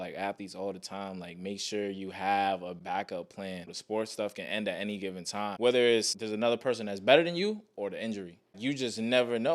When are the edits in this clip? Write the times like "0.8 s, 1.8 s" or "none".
2.8 s, 3.7 s, 5.4 s, 6.2 s, 8.5 s